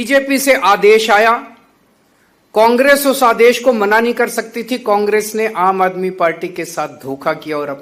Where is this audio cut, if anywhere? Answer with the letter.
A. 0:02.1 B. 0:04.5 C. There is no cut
C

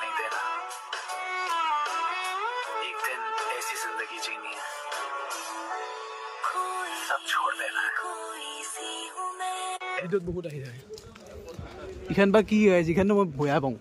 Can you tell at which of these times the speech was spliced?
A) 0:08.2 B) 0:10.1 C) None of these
B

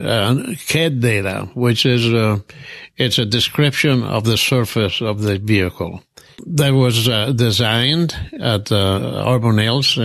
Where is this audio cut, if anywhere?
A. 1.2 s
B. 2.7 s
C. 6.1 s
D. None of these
D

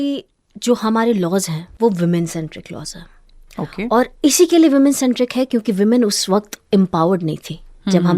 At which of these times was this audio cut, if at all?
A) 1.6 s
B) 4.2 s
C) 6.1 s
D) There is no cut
A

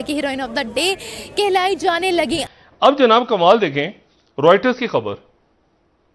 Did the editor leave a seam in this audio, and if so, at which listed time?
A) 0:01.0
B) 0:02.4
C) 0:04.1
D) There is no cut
B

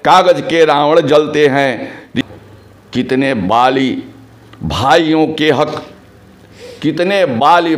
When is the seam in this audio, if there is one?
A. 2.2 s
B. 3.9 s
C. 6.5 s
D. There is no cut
A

